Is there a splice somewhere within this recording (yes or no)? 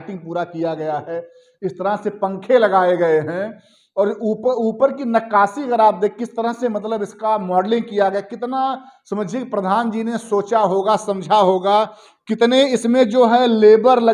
no